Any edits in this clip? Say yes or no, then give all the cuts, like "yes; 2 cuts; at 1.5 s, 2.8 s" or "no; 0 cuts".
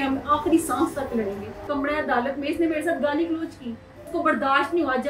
yes; 2 cuts; at 1.6 s, 4.0 s